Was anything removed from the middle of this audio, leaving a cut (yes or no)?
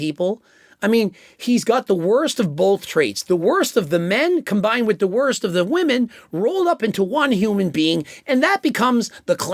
no